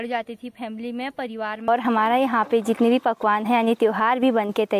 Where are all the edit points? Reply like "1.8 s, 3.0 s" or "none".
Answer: 1.7 s